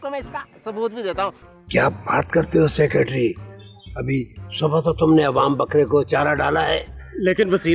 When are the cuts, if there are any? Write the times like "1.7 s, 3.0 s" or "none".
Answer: 1.4 s